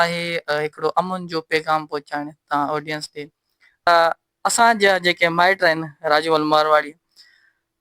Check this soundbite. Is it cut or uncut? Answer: cut